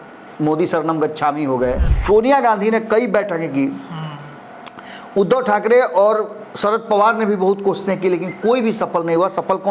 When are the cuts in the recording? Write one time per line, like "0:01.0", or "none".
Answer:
0:01.9